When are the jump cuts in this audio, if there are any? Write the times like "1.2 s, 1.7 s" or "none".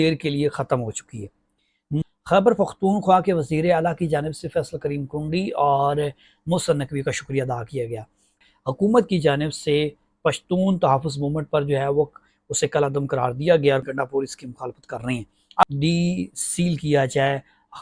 1.9 s, 8.4 s, 13.8 s, 15.6 s